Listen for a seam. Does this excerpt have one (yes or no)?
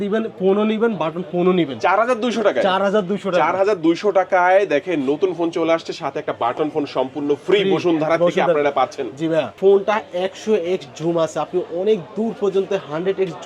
yes